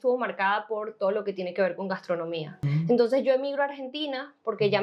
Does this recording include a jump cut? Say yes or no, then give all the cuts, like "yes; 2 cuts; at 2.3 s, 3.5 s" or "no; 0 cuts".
yes; 1 cut; at 2.6 s